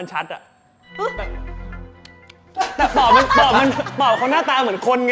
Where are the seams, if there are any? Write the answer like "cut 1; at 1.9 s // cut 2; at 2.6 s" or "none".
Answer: none